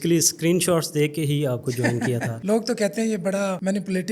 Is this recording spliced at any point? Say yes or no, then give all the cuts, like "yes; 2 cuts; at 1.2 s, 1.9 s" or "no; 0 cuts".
no; 0 cuts